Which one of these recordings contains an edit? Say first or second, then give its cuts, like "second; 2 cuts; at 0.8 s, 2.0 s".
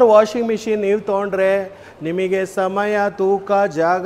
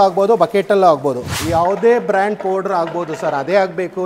second; 1 cut; at 1.3 s